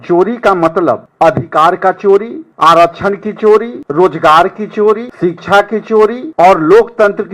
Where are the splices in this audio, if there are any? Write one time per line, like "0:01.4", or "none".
0:01.1
0:02.4
0:03.8
0:05.1
0:06.2